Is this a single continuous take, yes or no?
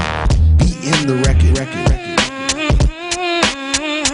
no